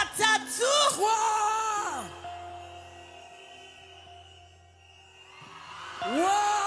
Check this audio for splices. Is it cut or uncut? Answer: uncut